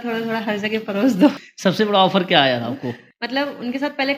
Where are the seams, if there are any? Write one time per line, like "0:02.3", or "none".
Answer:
0:03.1